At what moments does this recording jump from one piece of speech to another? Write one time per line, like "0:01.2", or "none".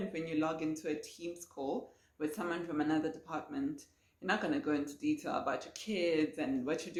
none